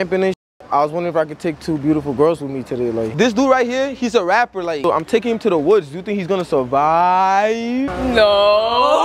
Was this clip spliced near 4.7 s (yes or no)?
yes